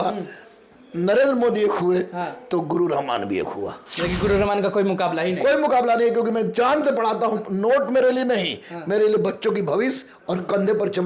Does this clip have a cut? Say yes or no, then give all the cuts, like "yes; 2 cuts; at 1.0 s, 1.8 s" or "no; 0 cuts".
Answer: no; 0 cuts